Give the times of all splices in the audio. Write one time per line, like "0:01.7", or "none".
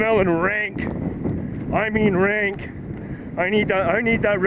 none